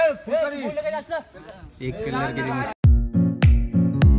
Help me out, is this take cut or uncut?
cut